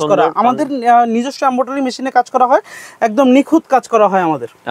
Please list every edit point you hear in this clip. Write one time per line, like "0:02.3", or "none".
none